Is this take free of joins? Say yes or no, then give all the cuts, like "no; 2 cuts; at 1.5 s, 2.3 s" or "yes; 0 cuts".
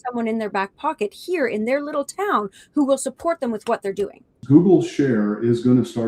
no; 1 cut; at 4.3 s